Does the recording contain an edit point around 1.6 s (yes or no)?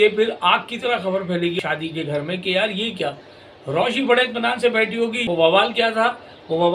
yes